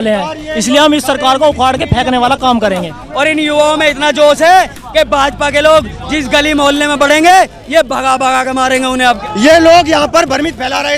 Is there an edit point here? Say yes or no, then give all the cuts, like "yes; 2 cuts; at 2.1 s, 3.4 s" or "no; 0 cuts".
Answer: yes; 2 cuts; at 3.0 s, 9.0 s